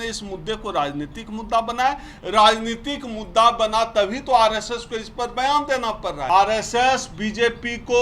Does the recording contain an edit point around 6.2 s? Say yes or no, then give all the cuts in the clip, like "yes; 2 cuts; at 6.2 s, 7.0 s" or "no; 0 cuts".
yes; 1 cut; at 6.2 s